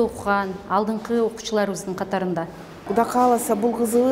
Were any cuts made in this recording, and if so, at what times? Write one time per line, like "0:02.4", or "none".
0:02.9